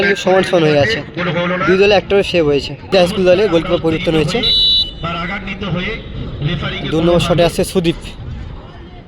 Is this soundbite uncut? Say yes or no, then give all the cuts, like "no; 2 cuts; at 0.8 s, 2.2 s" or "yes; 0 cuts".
no; 1 cut; at 2.8 s